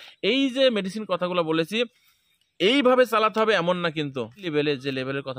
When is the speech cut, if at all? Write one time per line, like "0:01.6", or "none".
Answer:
0:04.4